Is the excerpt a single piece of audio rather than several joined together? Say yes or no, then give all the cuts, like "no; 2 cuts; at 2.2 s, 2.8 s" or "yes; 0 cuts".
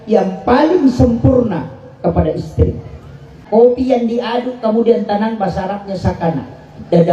no; 1 cut; at 3.4 s